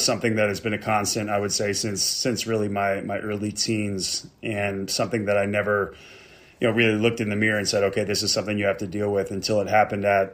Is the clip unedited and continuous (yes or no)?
yes